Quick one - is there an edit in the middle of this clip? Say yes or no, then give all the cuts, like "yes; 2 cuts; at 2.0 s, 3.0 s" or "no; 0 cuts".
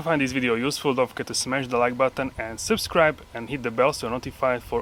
no; 0 cuts